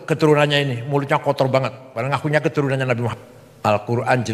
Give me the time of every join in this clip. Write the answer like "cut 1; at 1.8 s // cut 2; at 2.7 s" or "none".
cut 1; at 3.1 s